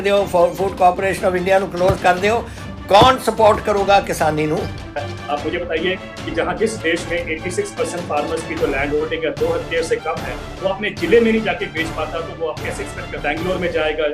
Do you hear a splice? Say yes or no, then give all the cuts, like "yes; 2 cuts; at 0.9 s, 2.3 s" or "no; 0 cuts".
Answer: yes; 2 cuts; at 5.0 s, 13.1 s